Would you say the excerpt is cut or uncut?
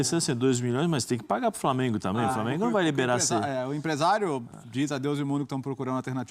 uncut